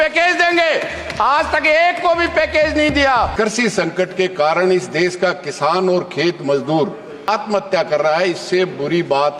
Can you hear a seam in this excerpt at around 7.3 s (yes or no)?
yes